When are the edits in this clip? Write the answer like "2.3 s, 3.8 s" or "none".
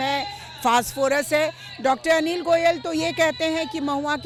none